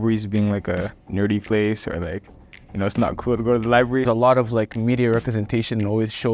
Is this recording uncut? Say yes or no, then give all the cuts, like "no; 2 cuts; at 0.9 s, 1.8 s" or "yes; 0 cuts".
no; 2 cuts; at 1.0 s, 4.0 s